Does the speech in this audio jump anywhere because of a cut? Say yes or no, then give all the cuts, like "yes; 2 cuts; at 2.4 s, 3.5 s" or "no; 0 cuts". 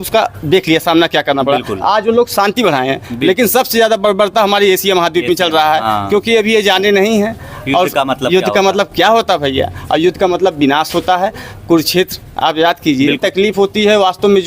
yes; 1 cut; at 13.2 s